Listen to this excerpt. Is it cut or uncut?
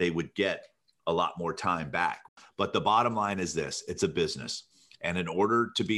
cut